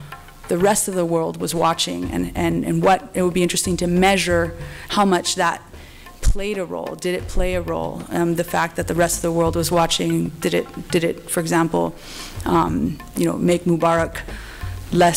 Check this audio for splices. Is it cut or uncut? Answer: uncut